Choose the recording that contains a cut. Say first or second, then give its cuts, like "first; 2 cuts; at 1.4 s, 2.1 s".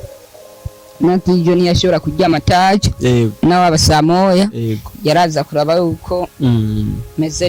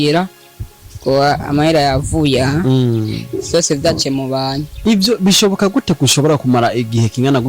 second; 1 cut; at 4.7 s